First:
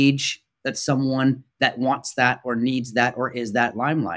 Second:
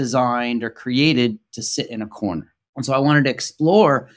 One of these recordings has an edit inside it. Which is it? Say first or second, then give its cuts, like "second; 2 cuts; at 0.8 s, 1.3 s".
second; 1 cut; at 2.6 s